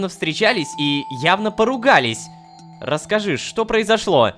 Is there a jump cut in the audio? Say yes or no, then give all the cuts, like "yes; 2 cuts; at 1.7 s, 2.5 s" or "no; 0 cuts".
no; 0 cuts